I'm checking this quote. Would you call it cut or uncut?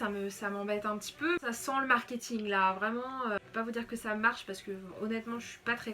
cut